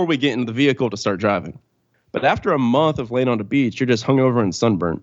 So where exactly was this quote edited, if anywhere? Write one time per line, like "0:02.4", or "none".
0:01.8